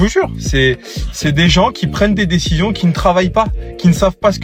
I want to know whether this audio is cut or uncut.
uncut